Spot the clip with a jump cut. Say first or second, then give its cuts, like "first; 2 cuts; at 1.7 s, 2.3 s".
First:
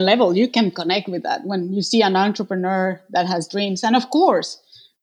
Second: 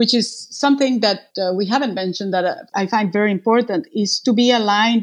second; 2 cuts; at 1.3 s, 2.6 s